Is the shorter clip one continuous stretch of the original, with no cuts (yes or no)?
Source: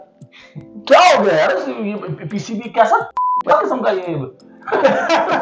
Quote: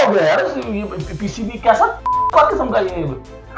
yes